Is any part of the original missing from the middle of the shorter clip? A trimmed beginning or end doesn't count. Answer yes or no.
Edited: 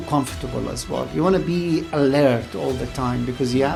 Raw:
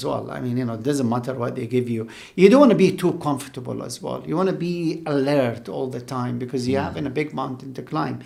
no